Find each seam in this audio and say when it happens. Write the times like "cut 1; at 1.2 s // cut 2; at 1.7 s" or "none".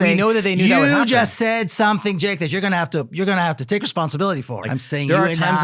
cut 1; at 4.6 s

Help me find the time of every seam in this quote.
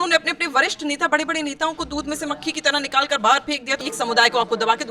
cut 1; at 3.8 s

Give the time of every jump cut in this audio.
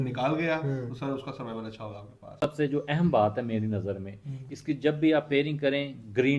cut 1; at 2.4 s

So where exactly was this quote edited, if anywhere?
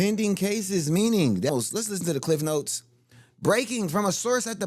cut 1; at 1.5 s

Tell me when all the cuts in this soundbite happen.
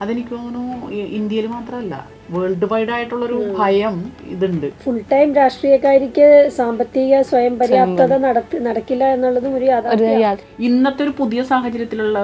cut 1; at 4.4 s // cut 2; at 10.5 s

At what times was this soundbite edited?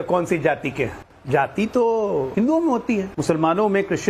cut 1; at 1.0 s // cut 2; at 2.3 s // cut 3; at 3.1 s

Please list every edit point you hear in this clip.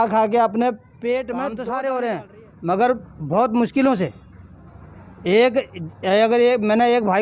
cut 1; at 1.5 s

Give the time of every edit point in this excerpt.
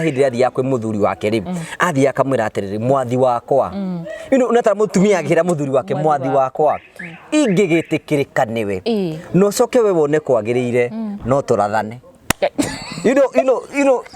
none

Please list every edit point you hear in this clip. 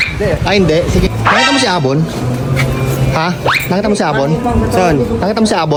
none

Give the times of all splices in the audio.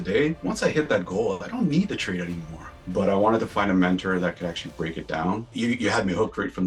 cut 1; at 2.9 s // cut 2; at 5.5 s

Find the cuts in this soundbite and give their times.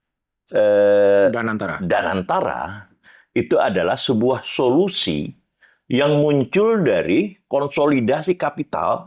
none

